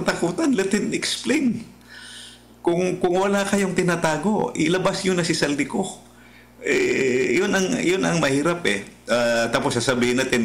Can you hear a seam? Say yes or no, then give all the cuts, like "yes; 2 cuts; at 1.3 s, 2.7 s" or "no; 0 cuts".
no; 0 cuts